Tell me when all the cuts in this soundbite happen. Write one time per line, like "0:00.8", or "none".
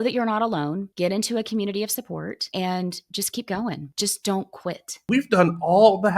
0:00.9
0:02.5
0:03.9
0:05.0